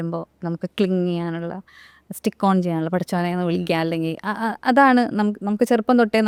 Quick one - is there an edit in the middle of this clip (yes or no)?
no